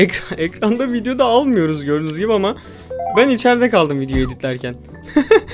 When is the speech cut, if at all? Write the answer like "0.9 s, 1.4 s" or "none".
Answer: none

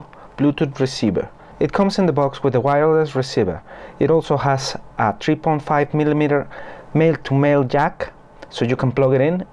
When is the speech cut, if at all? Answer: 1.4 s

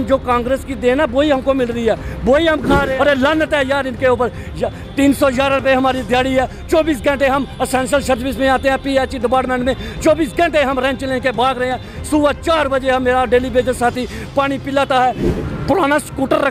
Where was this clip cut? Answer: 2.9 s, 15.3 s

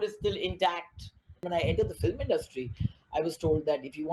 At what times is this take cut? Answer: 1.4 s

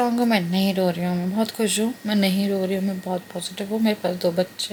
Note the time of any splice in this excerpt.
none

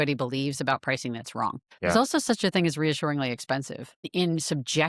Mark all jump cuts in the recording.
1.7 s, 4.1 s

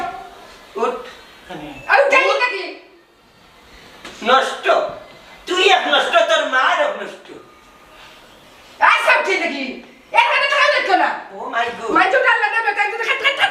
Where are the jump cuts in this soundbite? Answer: none

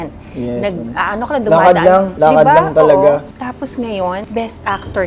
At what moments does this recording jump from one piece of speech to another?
3.3 s, 4.2 s

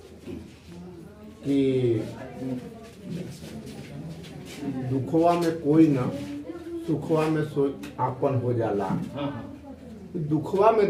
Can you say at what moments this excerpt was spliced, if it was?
none

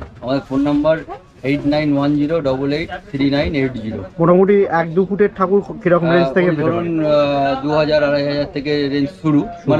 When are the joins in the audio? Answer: none

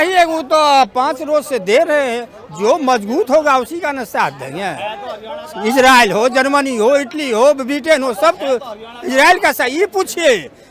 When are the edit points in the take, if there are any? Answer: none

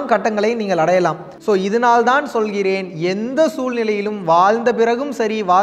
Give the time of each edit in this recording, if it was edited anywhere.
1.3 s

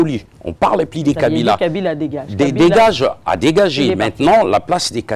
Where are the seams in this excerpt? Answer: none

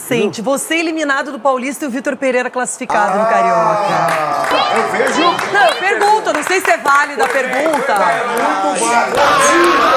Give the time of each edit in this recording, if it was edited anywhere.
none

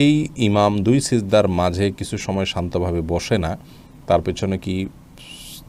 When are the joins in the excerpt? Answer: none

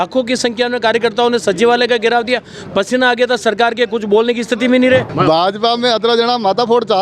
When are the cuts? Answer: 5.1 s

